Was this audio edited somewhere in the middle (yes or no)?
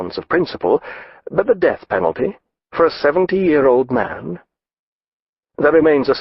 no